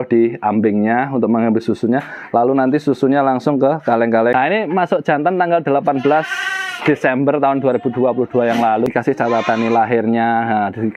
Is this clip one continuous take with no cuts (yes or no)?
no